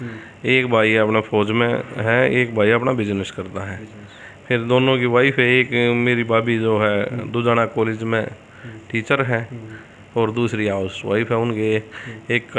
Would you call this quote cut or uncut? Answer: uncut